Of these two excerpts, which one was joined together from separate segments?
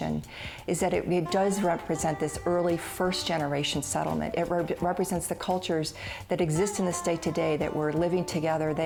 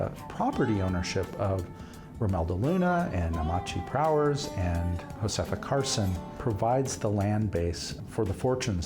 second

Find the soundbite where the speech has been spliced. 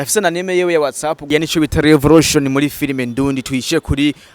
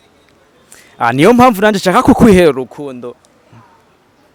first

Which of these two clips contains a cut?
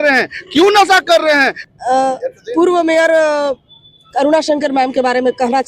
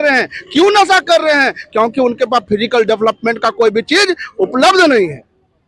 first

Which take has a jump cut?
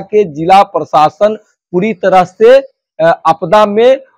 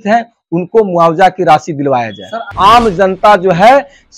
second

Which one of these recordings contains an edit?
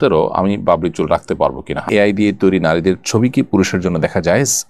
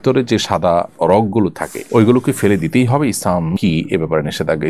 first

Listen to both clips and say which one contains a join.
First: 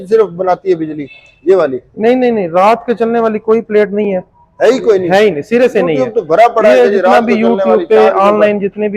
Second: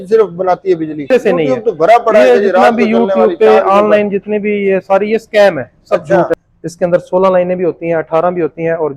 second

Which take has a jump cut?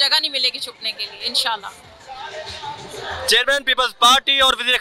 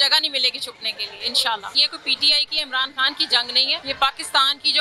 second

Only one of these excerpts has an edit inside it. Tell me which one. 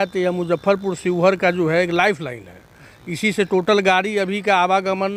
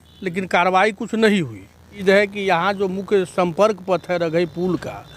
second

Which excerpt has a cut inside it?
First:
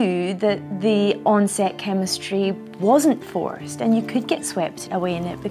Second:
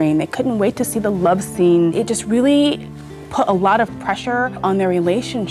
second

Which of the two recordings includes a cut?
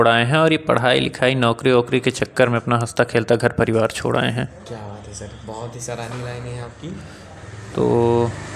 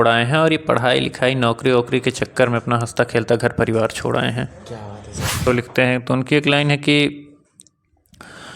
second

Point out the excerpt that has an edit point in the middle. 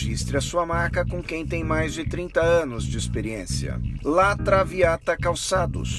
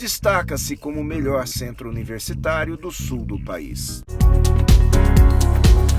second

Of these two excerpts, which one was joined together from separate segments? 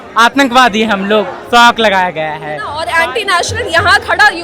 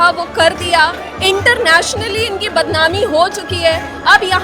first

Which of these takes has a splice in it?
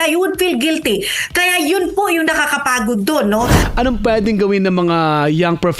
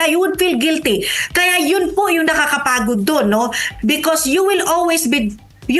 first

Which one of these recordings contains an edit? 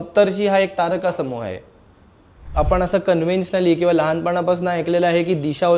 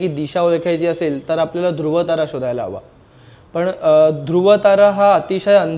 first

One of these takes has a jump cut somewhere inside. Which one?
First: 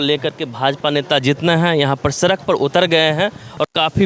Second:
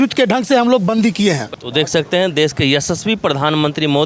second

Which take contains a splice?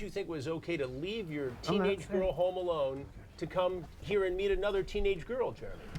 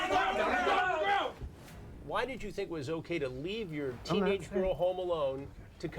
second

